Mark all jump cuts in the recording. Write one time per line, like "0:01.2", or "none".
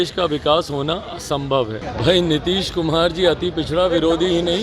0:01.8